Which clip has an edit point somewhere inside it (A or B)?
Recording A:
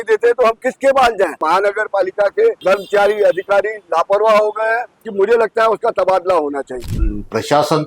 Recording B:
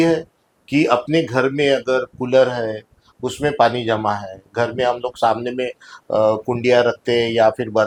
A